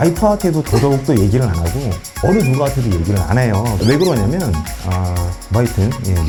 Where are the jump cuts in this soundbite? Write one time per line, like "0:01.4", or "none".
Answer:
none